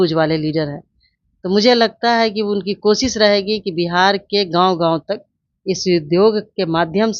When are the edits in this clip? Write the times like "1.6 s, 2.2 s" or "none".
none